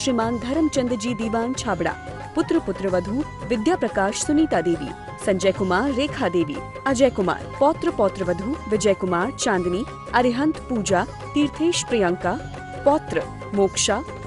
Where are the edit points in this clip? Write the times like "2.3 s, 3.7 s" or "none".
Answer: none